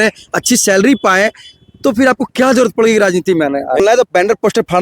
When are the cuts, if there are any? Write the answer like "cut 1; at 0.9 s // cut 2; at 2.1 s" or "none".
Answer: cut 1; at 3.8 s